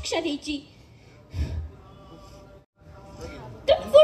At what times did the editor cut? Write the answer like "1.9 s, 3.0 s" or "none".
2.8 s